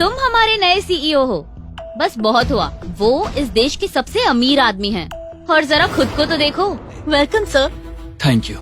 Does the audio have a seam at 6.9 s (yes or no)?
yes